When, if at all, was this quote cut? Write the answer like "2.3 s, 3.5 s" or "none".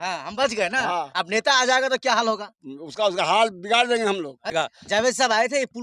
4.5 s